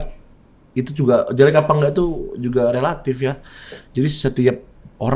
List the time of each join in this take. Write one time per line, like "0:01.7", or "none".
none